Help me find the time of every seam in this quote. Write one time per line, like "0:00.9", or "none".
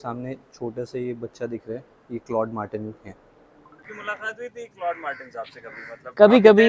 0:03.8